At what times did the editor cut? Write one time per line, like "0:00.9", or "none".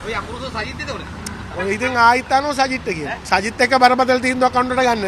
0:01.4
0:03.1